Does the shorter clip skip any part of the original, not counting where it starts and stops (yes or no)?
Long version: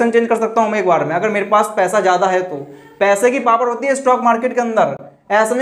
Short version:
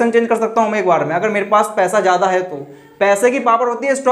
no